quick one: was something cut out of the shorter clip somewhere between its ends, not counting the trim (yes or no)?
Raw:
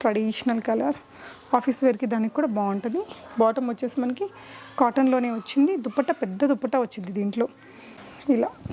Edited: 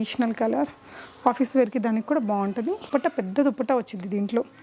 yes